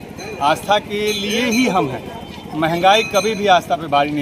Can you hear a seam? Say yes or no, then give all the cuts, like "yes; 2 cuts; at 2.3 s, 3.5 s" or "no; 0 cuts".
no; 0 cuts